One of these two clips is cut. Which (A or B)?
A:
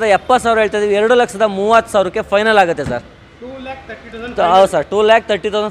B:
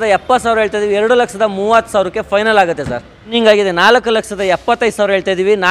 B